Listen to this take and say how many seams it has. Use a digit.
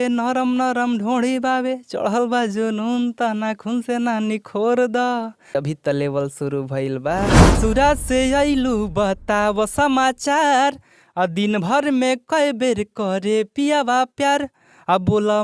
2